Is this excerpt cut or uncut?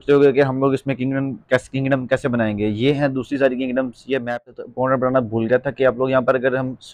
cut